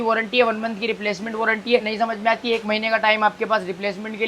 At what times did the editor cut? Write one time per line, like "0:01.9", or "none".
0:01.9